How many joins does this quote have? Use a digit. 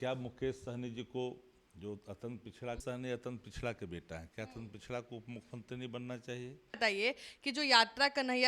2